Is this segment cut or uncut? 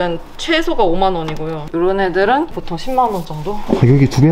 cut